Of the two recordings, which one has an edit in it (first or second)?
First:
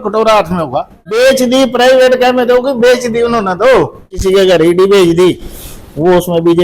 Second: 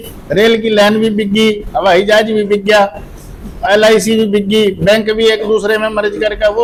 first